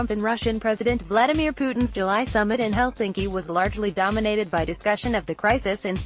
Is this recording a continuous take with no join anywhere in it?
yes; 0 cuts

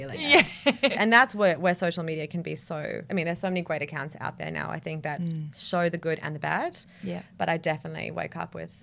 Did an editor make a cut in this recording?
yes; 2 cuts; at 0.9 s, 3.0 s

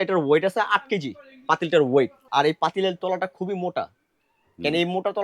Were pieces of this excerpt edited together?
yes; 1 cut; at 2.2 s

